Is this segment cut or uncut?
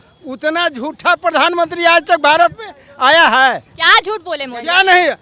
uncut